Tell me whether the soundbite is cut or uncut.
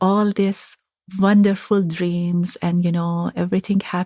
uncut